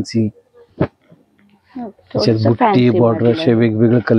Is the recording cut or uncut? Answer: uncut